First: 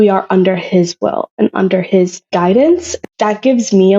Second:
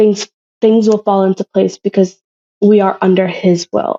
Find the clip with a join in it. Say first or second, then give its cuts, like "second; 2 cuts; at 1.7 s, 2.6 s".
first; 2 cuts; at 2.2 s, 2.9 s